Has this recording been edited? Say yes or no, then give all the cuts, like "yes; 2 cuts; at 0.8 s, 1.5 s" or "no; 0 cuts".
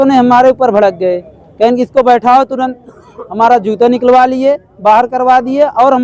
no; 0 cuts